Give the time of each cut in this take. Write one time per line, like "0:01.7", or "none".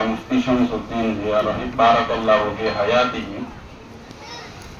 none